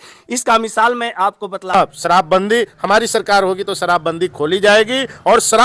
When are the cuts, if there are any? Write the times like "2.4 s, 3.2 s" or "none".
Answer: 1.7 s